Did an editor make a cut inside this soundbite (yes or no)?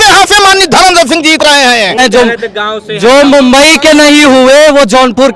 yes